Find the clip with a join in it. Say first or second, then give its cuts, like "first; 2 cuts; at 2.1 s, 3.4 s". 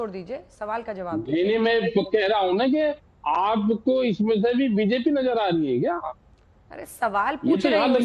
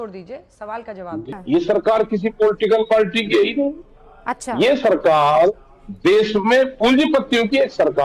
second; 1 cut; at 1.2 s